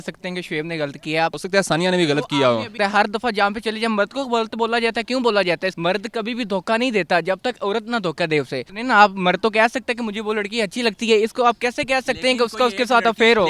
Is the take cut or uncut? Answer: cut